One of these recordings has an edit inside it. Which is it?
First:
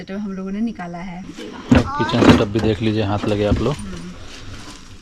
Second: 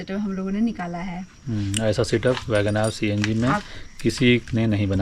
first; 1 cut; at 1.3 s

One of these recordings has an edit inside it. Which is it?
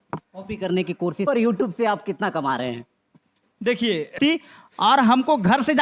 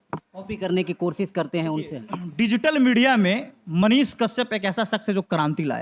first; 2 cuts; at 1.2 s, 4.2 s

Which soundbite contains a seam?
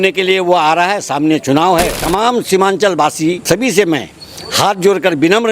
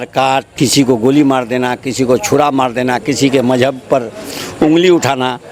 first; 2 cuts; at 2.0 s, 3.4 s

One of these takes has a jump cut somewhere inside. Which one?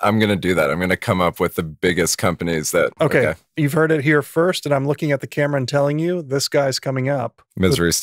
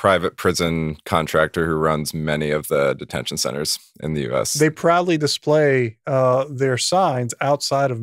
first; 1 cut; at 2.9 s

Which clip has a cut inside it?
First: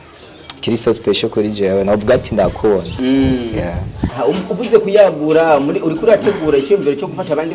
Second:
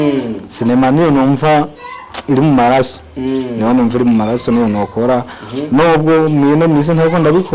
first; 1 cut; at 4.0 s

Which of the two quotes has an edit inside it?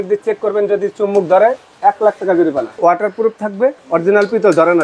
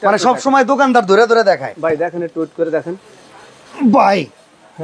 first; 2 cuts; at 2.8 s, 3.8 s

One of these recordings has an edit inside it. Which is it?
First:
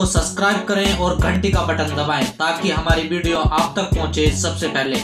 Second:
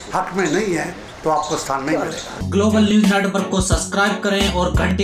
second; 1 cut; at 2.3 s

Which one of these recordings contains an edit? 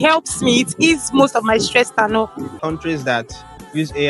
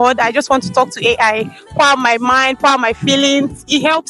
first; 1 cut; at 2.6 s

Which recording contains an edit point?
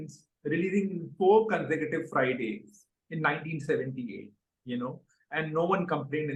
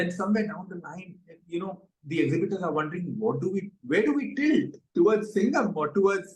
second; 1 cut; at 4.8 s

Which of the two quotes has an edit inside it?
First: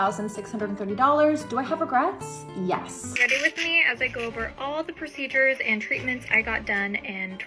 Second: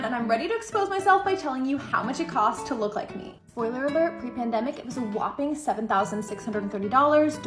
first; 1 cut; at 3.1 s

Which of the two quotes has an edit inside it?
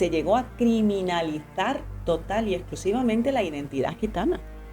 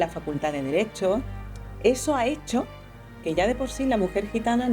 second; 1 cut; at 1.4 s

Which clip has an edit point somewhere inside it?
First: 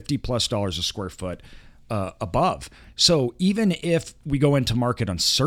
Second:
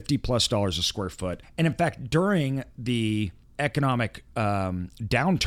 second; 2 cuts; at 1.4 s, 3.4 s

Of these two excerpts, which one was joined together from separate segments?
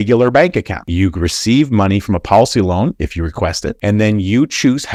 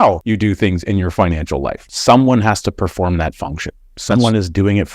second; 1 cut; at 1.8 s

